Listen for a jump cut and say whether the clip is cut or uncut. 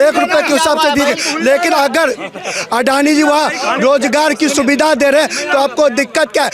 uncut